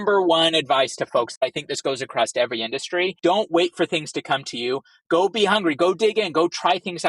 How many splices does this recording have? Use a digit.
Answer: 2